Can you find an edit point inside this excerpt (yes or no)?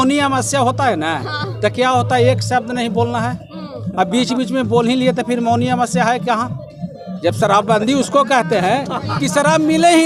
no